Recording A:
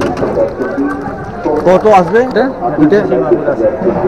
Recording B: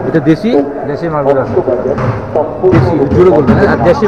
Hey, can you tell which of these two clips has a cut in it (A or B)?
A